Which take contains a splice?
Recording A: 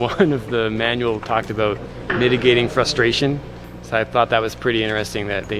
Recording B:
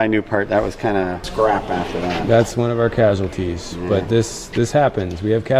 B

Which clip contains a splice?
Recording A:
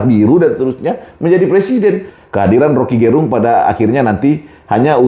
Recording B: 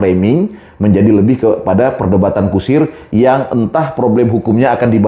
A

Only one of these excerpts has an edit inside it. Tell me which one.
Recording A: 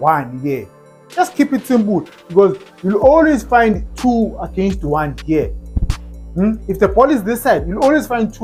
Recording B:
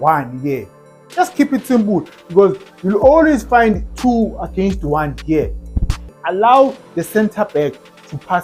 B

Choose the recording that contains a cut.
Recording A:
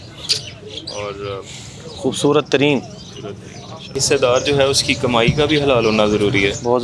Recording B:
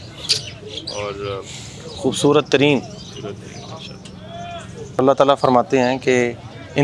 A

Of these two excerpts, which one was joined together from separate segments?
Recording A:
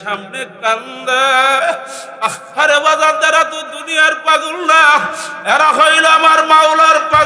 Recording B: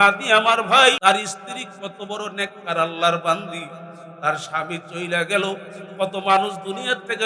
B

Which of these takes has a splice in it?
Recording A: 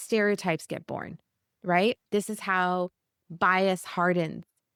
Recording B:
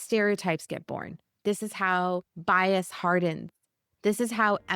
B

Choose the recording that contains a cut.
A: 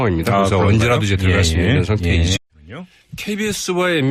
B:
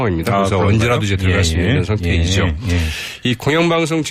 B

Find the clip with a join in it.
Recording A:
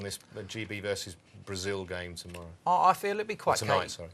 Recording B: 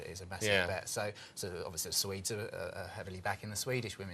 B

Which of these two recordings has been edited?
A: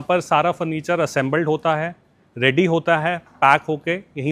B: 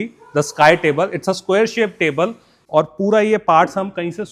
B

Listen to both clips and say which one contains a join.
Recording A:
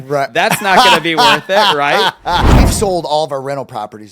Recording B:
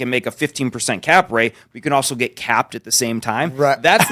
A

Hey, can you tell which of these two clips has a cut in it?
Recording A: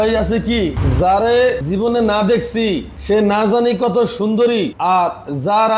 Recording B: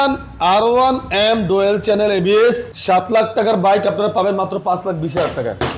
A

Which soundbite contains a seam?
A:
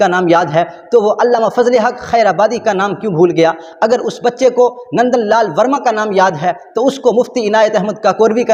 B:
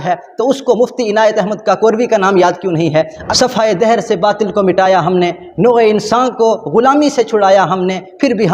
B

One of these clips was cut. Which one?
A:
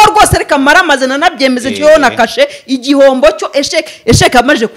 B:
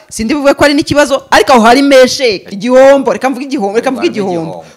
B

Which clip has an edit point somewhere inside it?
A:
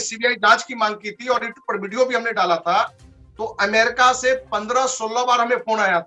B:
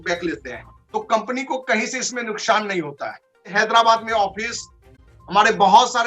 B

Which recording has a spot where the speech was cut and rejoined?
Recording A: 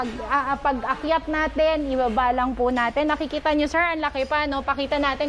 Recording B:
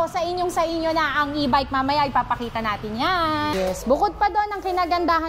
B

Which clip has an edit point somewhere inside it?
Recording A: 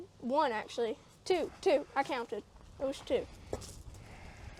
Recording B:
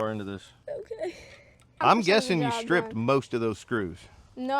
B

